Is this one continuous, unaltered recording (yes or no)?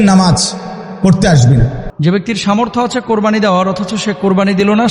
no